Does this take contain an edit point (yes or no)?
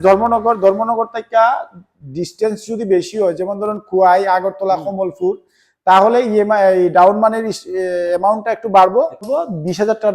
yes